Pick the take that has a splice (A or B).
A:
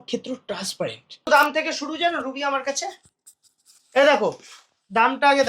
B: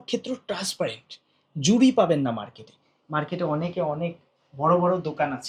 A